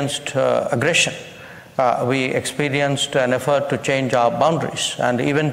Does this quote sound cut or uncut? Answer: uncut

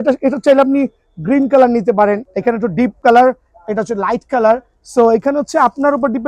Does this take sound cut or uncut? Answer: cut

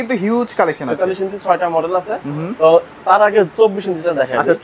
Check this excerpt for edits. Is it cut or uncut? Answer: uncut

